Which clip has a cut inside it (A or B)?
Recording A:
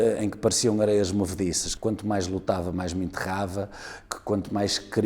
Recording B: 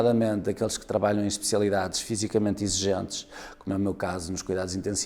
A